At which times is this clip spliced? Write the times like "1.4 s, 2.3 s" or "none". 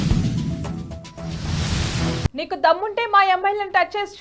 none